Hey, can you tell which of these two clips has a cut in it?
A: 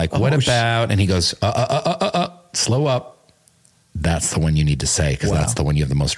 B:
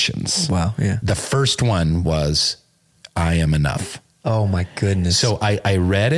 B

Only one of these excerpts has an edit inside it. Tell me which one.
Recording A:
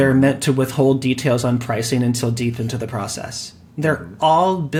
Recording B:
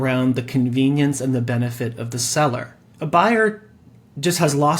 B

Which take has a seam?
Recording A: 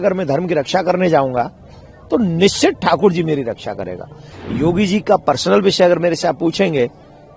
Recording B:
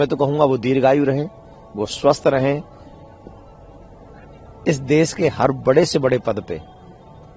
A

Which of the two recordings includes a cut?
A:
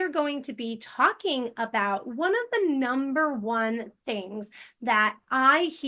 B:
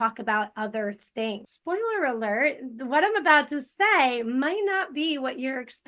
B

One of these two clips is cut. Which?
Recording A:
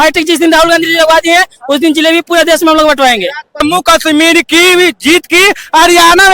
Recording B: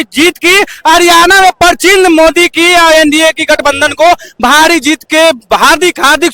A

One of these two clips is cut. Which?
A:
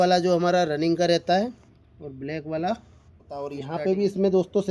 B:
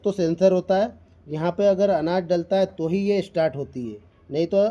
A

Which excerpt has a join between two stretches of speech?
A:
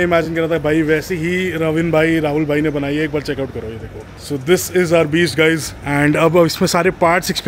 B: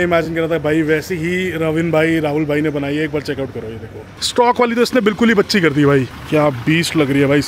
B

